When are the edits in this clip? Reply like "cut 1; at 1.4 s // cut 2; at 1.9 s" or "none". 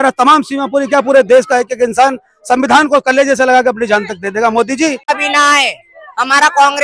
cut 1; at 5.0 s